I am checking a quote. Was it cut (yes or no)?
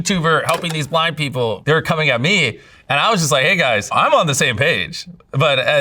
yes